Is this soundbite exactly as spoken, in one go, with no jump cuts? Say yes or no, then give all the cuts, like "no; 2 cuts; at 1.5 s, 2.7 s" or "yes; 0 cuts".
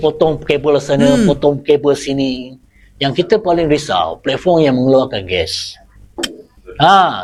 yes; 0 cuts